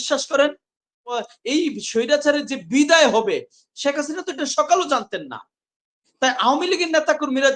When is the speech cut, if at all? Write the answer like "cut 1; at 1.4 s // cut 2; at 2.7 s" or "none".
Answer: cut 1; at 1.2 s